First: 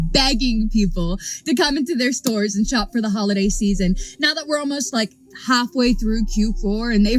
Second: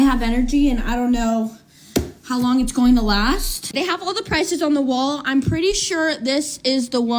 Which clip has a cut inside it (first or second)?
second